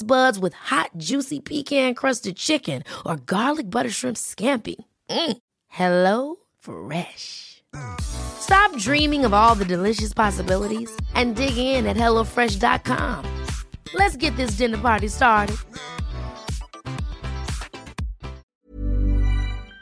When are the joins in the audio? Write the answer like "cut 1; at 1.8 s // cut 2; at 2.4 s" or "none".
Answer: cut 1; at 18.4 s